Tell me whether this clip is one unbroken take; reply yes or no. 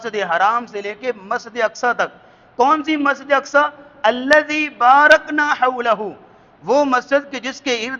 yes